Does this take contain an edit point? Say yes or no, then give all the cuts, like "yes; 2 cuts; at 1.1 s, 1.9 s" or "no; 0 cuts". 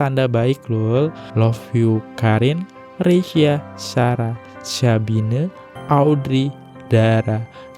yes; 1 cut; at 1.3 s